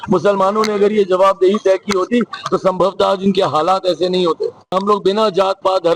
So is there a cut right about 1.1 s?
no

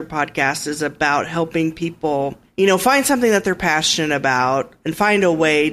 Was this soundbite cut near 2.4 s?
yes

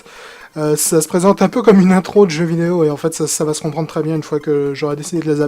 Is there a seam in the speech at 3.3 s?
yes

